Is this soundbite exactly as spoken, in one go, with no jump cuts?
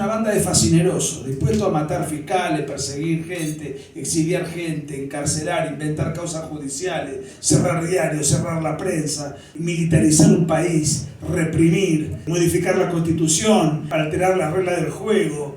no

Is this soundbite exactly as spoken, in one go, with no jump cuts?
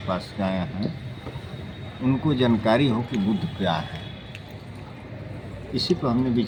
yes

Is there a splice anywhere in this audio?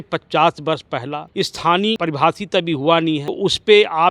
yes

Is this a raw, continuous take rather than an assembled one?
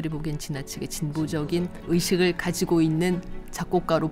no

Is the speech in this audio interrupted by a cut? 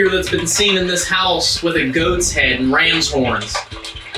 no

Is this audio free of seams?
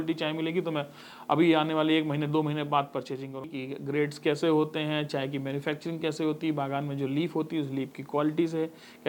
no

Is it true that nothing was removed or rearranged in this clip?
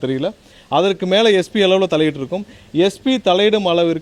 yes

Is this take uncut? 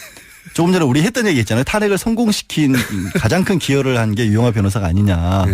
no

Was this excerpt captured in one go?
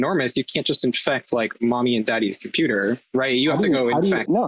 yes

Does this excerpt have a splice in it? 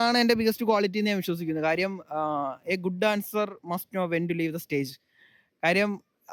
no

